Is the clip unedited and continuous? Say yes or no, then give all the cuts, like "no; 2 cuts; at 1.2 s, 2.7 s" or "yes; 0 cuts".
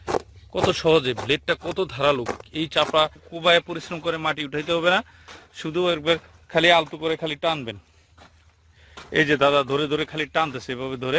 no; 1 cut; at 3.2 s